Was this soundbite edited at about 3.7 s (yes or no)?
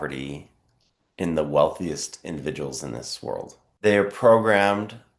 yes